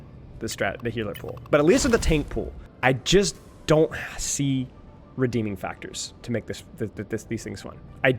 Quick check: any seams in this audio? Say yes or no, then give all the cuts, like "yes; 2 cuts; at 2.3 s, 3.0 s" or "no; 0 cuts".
no; 0 cuts